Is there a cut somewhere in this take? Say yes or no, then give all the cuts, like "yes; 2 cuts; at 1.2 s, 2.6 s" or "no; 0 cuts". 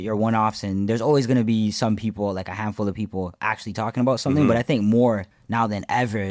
yes; 1 cut; at 5.4 s